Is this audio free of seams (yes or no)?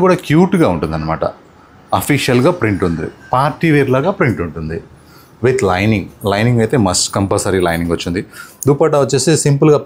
yes